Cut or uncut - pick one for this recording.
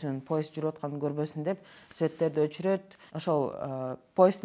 uncut